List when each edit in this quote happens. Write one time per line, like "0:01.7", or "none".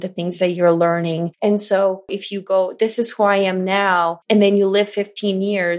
0:01.3
0:02.2
0:04.2